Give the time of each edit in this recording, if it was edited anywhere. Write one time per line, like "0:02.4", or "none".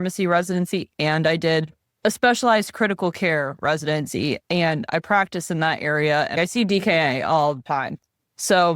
0:06.4
0:07.6

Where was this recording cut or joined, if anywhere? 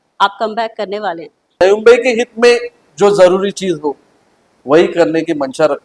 0:01.6

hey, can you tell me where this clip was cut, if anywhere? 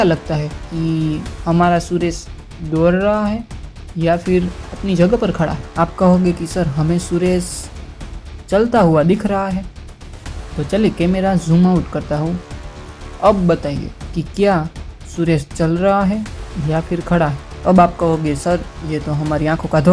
none

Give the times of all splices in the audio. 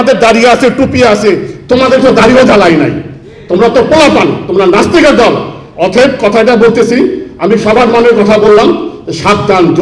none

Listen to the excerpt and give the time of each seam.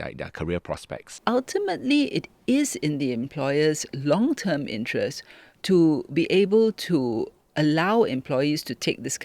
0:01.2

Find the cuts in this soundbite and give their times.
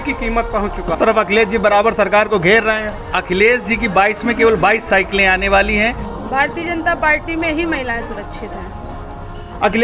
0:00.9
0:06.1

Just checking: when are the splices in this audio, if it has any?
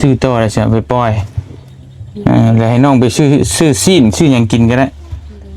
none

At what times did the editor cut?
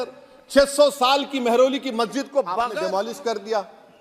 0:02.7

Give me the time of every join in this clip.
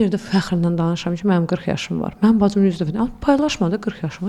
none

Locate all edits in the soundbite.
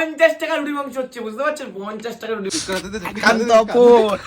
0:02.5

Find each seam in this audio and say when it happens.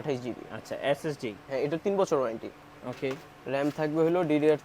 none

